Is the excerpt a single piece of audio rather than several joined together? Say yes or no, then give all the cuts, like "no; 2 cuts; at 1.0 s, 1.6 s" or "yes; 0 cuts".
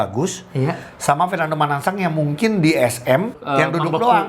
no; 1 cut; at 3.4 s